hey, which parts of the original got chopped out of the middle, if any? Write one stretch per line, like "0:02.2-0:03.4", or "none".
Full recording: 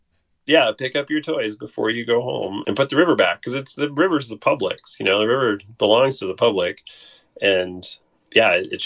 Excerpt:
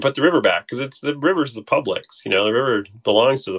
none

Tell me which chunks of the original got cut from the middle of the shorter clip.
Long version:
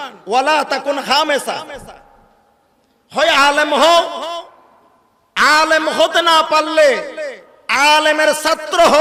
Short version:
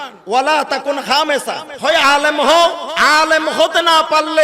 0:01.7-0:03.0
0:04.2-0:05.3

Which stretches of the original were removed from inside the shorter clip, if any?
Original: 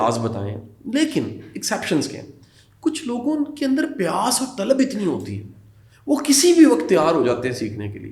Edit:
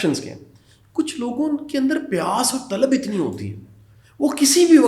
none

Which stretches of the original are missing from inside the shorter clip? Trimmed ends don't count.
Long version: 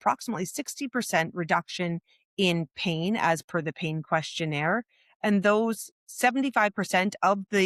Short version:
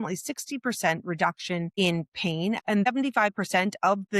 0:02.0-0:02.3
0:03.2-0:06.0

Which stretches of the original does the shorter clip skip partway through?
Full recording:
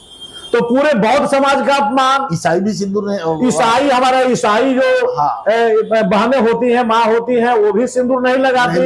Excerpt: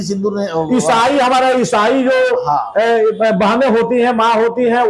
none

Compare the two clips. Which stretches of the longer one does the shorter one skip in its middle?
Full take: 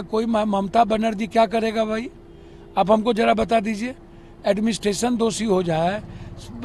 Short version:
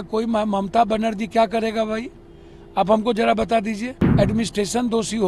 0:04.0-0:04.2

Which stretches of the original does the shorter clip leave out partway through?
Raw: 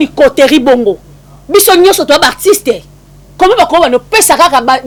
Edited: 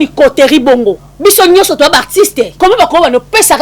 0:01.1-0:01.3
0:02.8-0:03.3

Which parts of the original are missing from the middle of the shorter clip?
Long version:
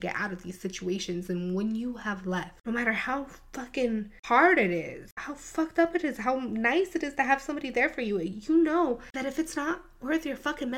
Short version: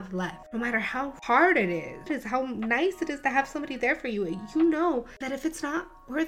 0:03.3-0:04.2
0:05.1-0:06.0

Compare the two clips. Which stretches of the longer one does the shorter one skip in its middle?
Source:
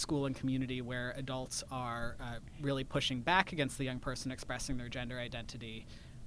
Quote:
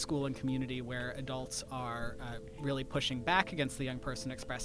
none

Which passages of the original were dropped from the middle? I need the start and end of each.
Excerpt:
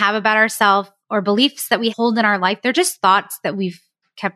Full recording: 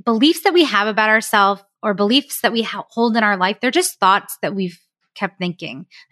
0:02.7-0:02.9

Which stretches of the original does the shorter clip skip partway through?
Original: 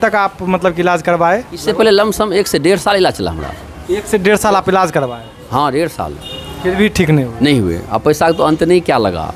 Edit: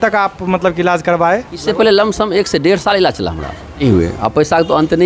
0:03.8-0:07.5

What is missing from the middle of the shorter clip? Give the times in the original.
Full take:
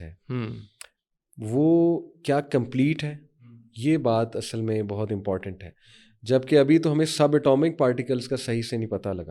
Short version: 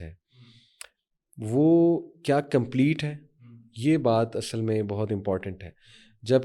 none

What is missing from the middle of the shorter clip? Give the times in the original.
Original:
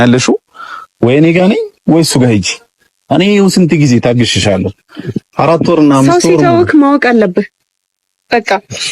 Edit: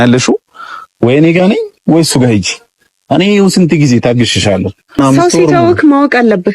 0:05.0-0:05.9

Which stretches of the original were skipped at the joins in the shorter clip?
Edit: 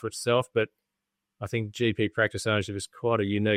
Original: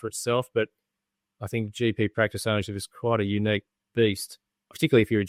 none

